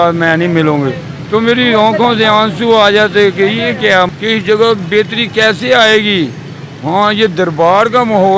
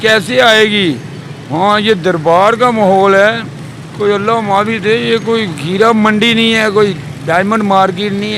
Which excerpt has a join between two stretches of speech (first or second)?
first